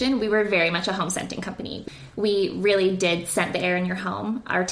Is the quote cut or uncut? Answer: cut